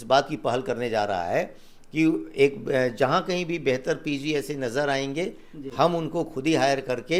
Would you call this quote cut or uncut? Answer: uncut